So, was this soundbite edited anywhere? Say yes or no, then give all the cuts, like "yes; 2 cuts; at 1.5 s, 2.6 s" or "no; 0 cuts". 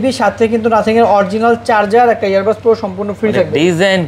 no; 0 cuts